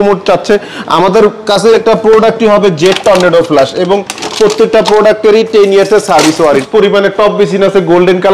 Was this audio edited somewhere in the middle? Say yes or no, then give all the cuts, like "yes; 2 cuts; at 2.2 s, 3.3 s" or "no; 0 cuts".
yes; 2 cuts; at 1.7 s, 6.7 s